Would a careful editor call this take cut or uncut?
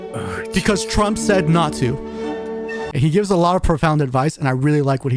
cut